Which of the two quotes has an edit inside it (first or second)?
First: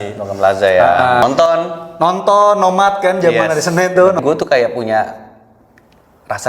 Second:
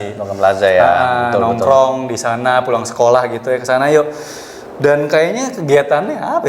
first